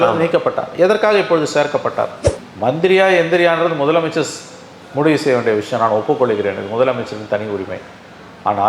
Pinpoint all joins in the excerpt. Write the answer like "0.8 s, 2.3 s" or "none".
2.2 s